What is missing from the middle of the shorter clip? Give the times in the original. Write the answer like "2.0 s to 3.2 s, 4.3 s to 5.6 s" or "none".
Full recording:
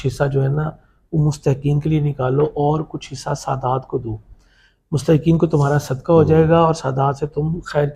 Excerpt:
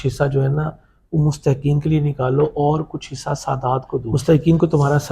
4.1 s to 4.9 s